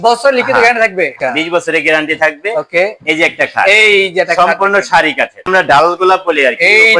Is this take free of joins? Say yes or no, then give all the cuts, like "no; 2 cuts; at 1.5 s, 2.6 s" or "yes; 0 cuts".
no; 2 cuts; at 1.1 s, 5.5 s